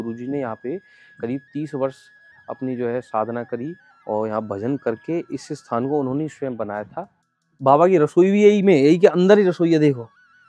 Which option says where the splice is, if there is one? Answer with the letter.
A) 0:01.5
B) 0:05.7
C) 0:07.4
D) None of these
C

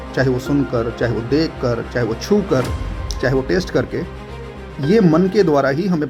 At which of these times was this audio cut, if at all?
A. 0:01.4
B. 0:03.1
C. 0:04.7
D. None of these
D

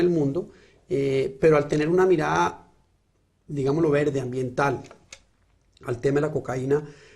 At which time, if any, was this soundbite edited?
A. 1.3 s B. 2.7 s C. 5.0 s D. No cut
D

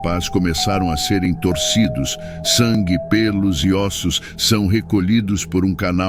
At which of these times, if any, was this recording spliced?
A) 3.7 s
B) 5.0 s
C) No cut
C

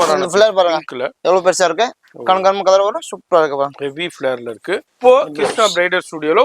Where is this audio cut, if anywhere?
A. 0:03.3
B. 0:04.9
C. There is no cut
B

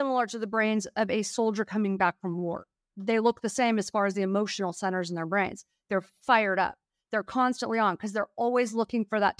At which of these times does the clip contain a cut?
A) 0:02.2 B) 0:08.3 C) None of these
C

